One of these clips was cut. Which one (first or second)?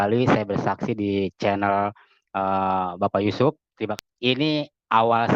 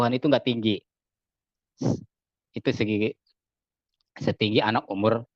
first